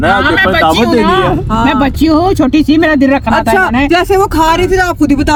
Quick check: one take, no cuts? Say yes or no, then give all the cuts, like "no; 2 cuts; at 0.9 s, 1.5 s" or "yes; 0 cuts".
yes; 0 cuts